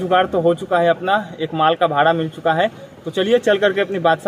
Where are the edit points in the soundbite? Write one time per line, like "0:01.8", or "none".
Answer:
none